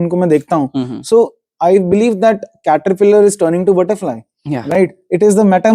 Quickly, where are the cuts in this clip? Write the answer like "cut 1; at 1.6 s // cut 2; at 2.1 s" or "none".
none